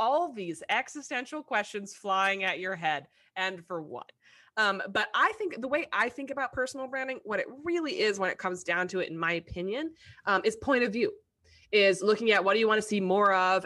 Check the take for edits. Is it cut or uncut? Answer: uncut